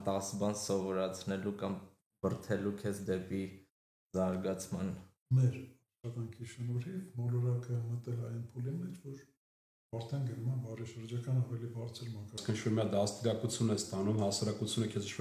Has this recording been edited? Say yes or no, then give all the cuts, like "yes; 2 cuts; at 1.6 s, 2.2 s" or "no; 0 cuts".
yes; 2 cuts; at 5.1 s, 12.4 s